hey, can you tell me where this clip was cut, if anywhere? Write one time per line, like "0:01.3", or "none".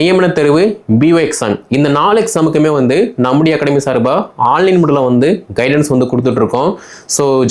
none